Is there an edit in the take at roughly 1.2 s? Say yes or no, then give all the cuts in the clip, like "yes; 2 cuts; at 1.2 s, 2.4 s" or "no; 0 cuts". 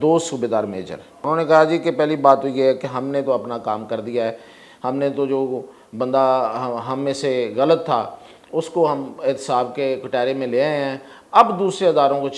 yes; 1 cut; at 1.2 s